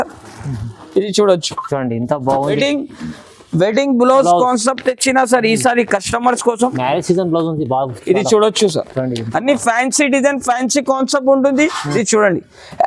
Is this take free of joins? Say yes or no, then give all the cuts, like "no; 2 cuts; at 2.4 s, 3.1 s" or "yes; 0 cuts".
no; 2 cuts; at 2.5 s, 12.0 s